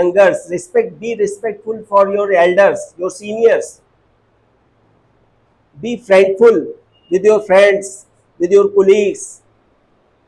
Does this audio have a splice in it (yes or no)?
no